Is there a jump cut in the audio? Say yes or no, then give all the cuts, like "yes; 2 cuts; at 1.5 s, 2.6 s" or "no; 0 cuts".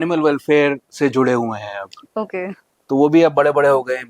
no; 0 cuts